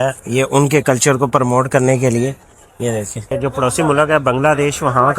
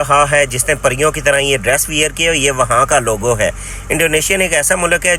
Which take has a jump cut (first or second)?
first